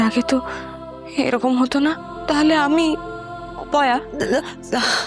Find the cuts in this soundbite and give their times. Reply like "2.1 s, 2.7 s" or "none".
2.1 s